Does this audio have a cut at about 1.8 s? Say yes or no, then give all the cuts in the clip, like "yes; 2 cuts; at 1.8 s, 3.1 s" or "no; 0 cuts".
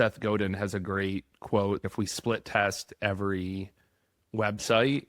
yes; 1 cut; at 1.8 s